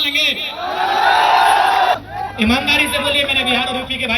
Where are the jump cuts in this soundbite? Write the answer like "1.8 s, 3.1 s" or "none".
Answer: 2.0 s